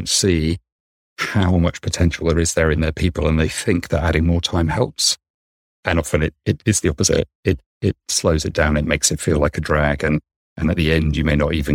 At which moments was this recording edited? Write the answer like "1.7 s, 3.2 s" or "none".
none